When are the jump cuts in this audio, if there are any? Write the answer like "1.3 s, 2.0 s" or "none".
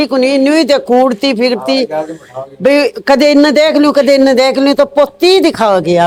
none

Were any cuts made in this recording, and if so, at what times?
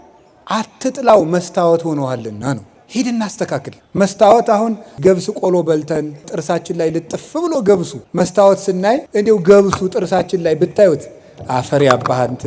2.8 s, 3.8 s, 5.0 s, 6.3 s, 8.0 s, 9.1 s

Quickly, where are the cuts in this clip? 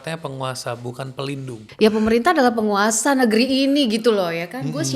1.6 s

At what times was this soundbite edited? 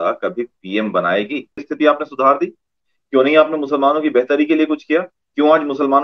1.7 s

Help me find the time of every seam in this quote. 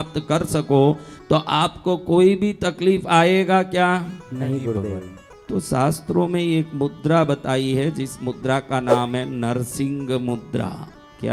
none

